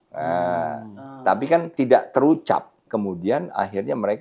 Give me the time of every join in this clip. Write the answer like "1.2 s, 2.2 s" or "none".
1.7 s, 2.8 s